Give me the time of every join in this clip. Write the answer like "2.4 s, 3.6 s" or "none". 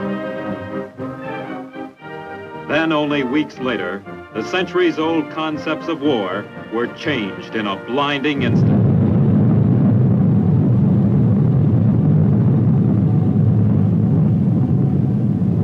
none